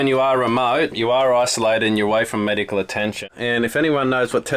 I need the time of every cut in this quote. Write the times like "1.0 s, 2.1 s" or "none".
3.2 s

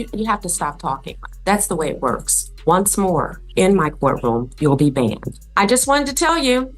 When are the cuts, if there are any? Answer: 2.5 s, 5.4 s

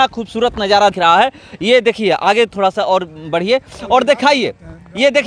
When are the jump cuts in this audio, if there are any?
1.0 s

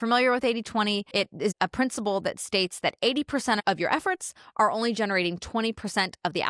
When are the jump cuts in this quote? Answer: 1.5 s, 3.6 s

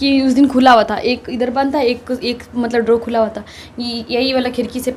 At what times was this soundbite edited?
none

